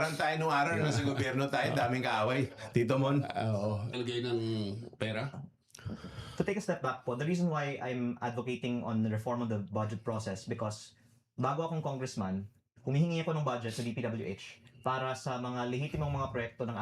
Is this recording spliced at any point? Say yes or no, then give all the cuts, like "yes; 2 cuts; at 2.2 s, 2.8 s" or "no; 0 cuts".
yes; 1 cut; at 3.9 s